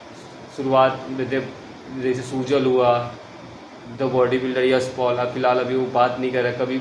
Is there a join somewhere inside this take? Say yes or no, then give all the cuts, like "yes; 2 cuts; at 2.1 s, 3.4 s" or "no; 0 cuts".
no; 0 cuts